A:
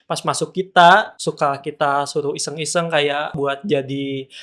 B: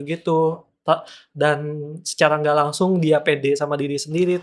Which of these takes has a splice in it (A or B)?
A